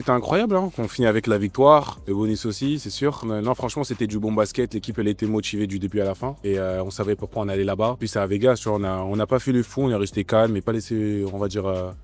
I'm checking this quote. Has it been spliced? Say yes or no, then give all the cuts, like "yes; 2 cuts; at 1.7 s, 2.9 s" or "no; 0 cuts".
yes; 5 cuts; at 2.0 s, 3.2 s, 6.3 s, 8.0 s, 10.7 s